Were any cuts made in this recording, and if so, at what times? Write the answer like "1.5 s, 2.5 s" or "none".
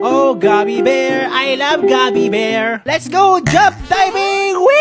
2.8 s